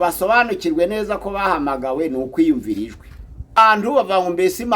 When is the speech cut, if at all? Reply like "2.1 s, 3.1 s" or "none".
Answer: 3.6 s